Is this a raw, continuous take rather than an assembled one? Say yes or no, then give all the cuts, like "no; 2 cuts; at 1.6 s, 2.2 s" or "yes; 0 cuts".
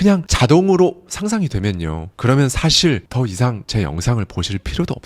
no; 1 cut; at 3.3 s